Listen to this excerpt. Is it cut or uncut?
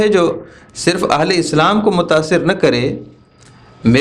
uncut